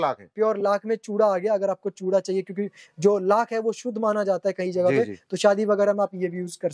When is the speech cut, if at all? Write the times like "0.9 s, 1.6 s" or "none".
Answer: none

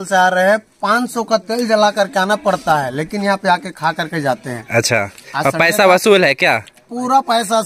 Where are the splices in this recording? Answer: none

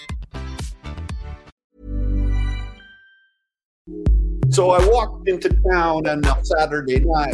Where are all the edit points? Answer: 1.5 s, 3.8 s

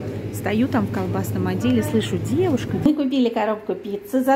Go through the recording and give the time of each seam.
2.9 s

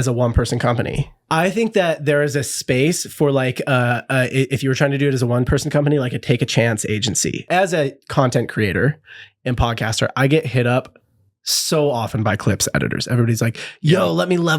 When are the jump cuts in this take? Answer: 1.1 s, 7.5 s

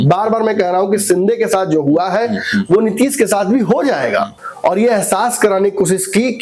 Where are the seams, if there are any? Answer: 4.4 s

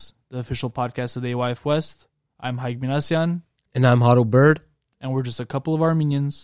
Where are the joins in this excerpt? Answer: none

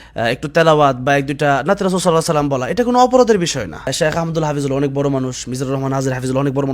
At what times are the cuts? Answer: 3.9 s

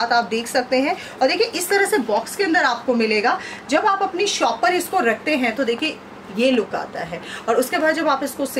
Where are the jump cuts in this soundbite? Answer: none

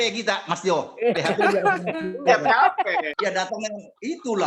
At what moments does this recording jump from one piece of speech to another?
3.1 s

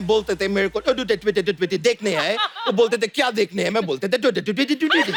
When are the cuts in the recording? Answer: none

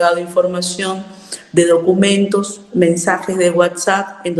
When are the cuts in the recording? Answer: none

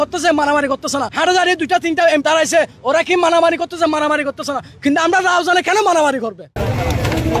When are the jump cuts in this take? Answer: 1.1 s, 2.2 s

